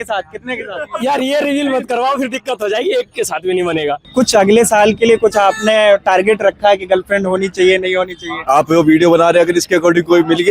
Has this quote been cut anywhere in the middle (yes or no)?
yes